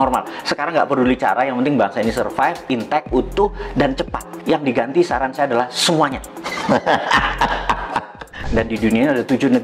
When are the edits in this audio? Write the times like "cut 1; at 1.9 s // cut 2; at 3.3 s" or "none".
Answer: cut 1; at 8.5 s